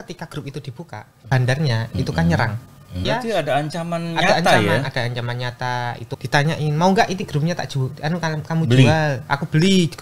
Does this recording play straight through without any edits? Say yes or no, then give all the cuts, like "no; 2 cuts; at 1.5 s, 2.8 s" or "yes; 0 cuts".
no; 3 cuts; at 1.3 s, 3.0 s, 6.1 s